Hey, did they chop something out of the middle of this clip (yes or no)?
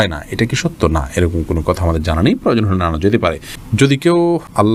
no